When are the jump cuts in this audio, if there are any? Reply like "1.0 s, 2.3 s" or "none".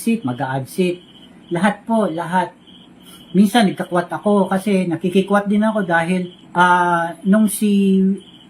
6.4 s